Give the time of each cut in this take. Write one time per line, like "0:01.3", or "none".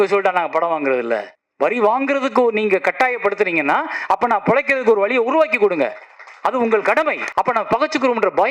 0:01.4
0:07.2